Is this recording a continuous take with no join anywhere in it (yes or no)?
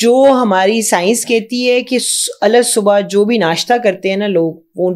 yes